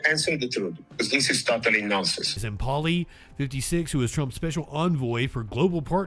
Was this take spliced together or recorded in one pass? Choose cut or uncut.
cut